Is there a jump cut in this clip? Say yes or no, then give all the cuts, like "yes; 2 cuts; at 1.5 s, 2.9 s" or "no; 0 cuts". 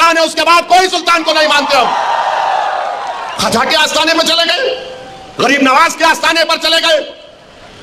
no; 0 cuts